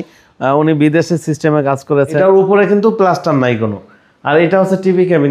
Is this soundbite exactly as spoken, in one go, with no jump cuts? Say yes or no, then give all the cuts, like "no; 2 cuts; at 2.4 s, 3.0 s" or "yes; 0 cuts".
no; 1 cut; at 2.2 s